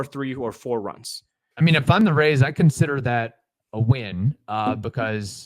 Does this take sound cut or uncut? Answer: cut